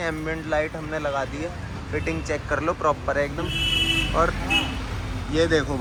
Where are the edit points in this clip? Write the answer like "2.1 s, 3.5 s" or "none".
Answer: none